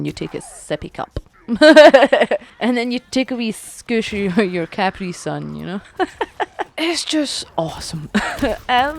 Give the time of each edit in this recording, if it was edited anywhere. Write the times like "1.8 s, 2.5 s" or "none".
3.0 s, 6.7 s